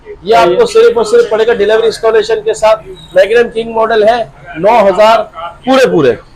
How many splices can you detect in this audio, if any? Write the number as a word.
zero